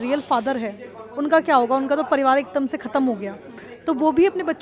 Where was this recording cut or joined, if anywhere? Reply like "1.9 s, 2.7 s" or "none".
none